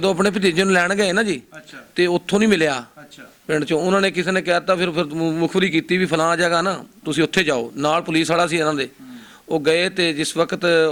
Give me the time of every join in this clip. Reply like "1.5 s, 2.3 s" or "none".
none